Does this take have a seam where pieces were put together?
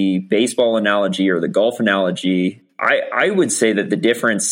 yes; 1 cut; at 2.7 s

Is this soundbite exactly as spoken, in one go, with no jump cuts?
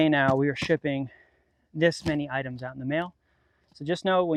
yes; 0 cuts

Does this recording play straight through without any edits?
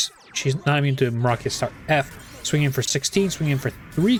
yes; 0 cuts

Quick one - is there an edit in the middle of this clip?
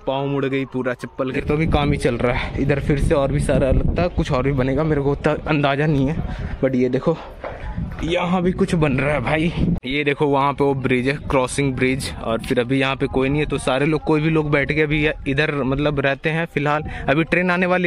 yes; 2 cuts; at 1.4 s, 9.8 s

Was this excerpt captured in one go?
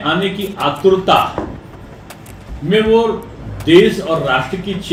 yes; 0 cuts

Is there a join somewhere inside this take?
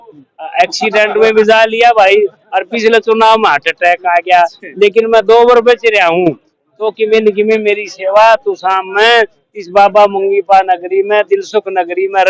no; 0 cuts

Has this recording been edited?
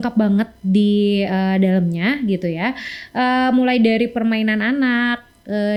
no; 0 cuts

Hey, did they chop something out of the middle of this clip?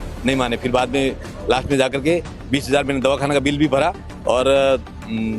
no; 0 cuts

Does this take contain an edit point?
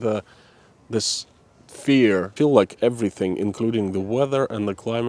yes; 1 cut; at 2.3 s

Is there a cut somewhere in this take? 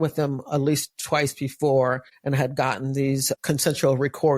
yes; 2 cuts; at 2.1 s, 3.4 s

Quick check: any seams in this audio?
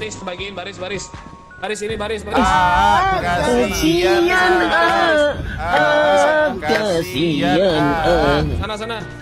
no; 0 cuts

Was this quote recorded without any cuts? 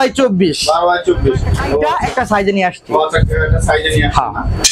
no; 1 cut; at 1.8 s

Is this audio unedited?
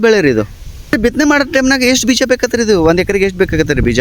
no; 1 cut; at 0.9 s

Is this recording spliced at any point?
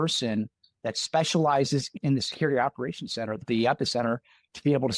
yes; 2 cuts; at 1.9 s, 3.4 s

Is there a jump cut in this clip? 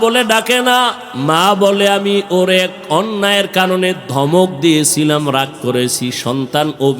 yes; 1 cut; at 1.1 s

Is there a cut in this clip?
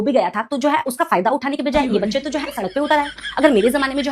no; 0 cuts

